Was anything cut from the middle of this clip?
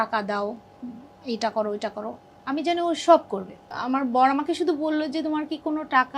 yes; 1 cut; at 3.7 s

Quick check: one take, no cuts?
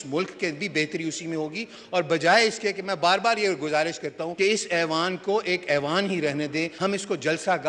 no; 2 cuts; at 4.2 s, 6.7 s

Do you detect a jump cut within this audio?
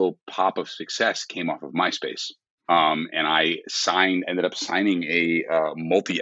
no; 0 cuts

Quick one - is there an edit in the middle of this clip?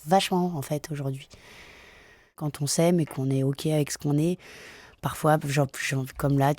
yes; 1 cut; at 2.5 s

